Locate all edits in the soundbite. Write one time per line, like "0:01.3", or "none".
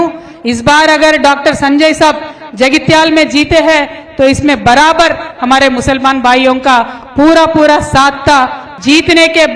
0:08.6